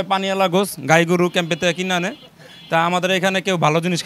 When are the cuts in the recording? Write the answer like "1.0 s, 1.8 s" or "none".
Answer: none